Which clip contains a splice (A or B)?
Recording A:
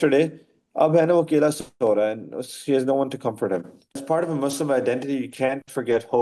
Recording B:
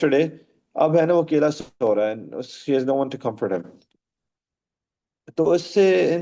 A